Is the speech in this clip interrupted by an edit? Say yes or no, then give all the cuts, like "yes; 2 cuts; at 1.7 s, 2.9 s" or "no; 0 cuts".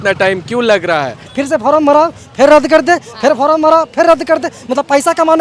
yes; 1 cut; at 1.3 s